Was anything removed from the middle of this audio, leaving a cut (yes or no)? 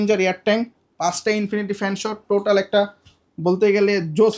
no